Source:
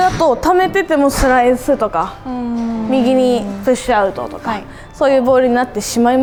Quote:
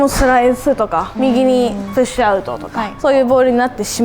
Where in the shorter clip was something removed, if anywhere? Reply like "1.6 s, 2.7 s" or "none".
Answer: 1.1 s, 2.8 s